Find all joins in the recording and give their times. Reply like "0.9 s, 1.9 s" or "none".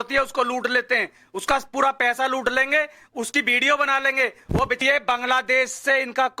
4.8 s